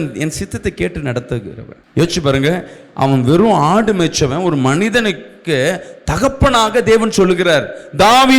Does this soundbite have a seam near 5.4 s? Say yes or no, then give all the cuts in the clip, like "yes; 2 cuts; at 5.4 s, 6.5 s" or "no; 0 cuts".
no; 1 cut; at 1.8 s